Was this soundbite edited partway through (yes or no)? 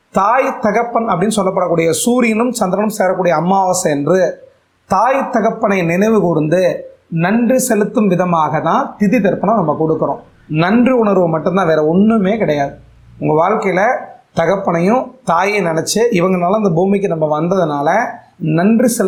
no